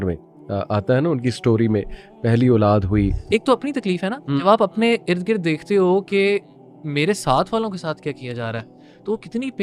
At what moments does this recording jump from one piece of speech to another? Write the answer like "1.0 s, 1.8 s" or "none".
3.2 s